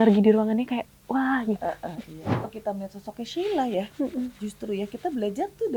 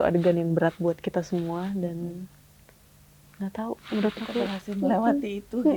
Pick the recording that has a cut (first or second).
first